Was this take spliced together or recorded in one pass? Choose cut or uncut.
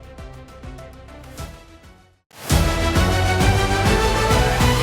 cut